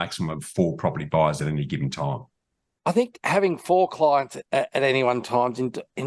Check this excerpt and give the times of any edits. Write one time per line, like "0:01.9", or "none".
0:02.7

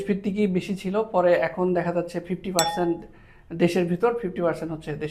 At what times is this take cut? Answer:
none

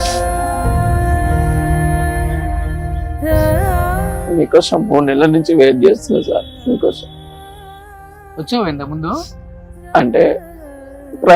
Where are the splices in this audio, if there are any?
none

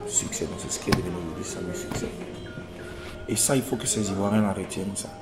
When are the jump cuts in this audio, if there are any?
0:03.1

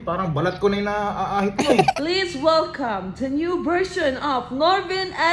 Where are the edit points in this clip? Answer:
0:01.9

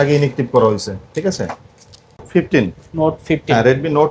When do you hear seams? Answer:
0:02.1

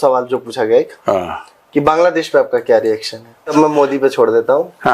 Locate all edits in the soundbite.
0:03.5

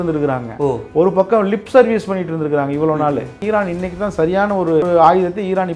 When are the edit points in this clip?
0:03.4
0:04.9

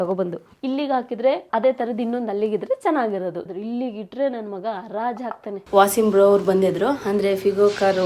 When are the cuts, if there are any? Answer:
0:03.4
0:05.7

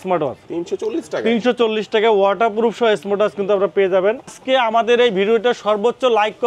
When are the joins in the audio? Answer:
0:04.4

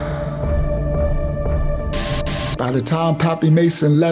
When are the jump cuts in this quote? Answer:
0:02.4

